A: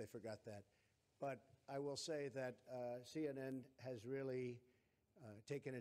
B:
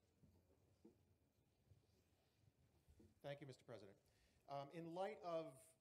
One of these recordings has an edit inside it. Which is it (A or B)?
A